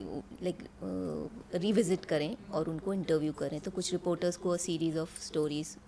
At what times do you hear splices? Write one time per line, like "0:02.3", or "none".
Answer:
none